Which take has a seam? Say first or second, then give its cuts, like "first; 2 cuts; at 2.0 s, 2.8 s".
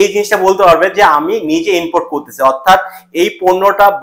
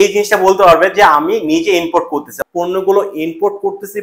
second; 1 cut; at 2.3 s